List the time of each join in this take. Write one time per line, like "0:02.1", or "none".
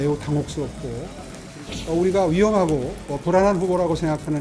0:01.4